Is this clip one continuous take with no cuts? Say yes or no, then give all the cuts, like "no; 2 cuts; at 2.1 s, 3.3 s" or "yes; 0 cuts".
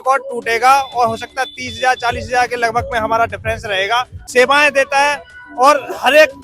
no; 1 cut; at 4.2 s